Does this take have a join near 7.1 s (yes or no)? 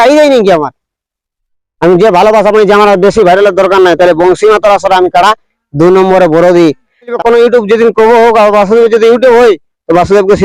yes